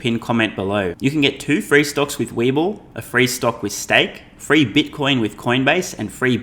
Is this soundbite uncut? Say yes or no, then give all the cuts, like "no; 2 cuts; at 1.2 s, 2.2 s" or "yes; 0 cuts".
yes; 0 cuts